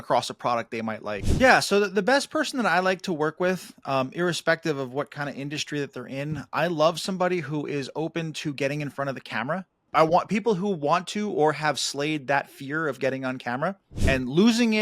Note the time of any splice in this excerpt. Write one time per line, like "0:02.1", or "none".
0:01.3
0:09.7
0:13.9